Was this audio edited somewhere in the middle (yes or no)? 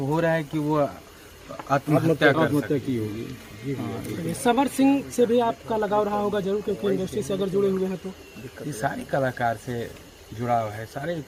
no